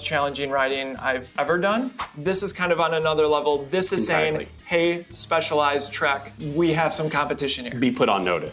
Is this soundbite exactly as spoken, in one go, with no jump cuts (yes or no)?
no